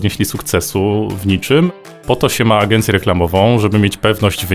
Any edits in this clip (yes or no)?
yes